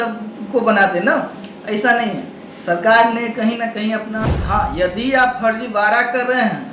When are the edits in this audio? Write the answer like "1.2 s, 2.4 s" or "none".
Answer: 4.1 s